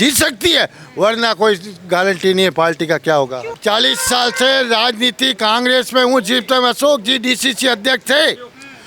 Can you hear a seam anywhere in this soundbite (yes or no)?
yes